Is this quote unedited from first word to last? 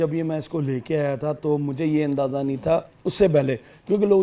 yes; 0 cuts

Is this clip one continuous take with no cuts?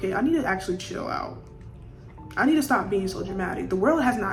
yes; 0 cuts

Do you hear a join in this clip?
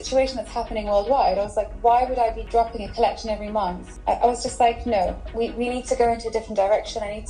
yes; 2 cuts; at 2.4 s, 3.9 s

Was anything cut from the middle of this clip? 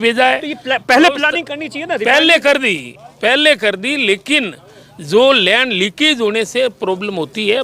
no; 0 cuts

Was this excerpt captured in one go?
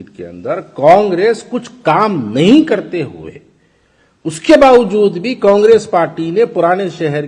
yes; 0 cuts

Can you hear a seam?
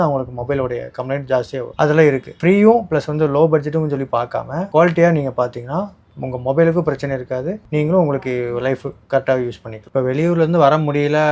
yes; 1 cut; at 9.8 s

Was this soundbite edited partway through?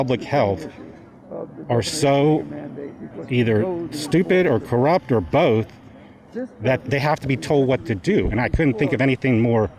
yes; 1 cut; at 6.8 s

